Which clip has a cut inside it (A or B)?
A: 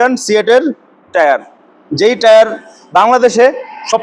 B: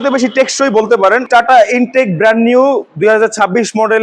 B